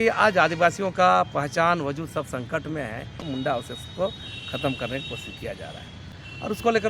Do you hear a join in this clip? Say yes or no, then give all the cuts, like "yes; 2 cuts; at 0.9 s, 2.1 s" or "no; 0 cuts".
yes; 1 cut; at 3.2 s